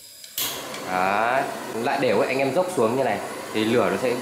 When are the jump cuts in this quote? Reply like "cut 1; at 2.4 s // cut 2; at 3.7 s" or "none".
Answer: cut 1; at 1.6 s